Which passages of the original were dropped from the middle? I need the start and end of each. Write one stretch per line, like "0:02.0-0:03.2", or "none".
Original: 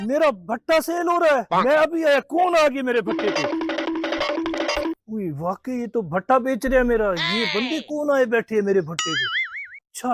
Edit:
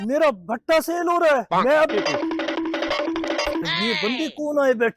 0:01.9-0:03.2
0:05.0-0:07.2